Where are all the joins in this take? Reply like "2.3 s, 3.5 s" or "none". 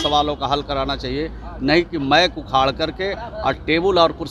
none